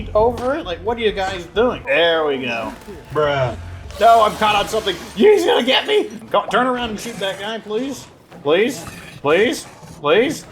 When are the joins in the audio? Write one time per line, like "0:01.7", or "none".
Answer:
0:01.8
0:06.1